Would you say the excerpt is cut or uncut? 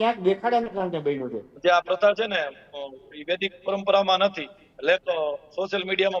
cut